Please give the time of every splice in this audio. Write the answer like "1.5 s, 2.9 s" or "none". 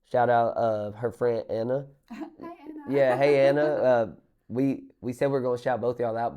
none